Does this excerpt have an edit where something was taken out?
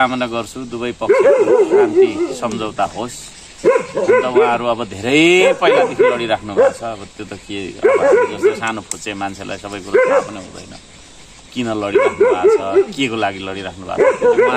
no; 0 cuts

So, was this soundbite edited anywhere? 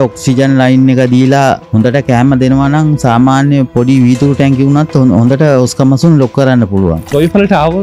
yes; 2 cuts; at 1.6 s, 7.1 s

